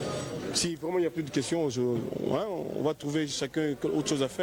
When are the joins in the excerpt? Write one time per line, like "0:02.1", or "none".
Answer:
none